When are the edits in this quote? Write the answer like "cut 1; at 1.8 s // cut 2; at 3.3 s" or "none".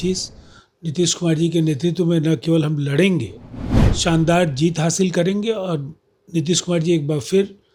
none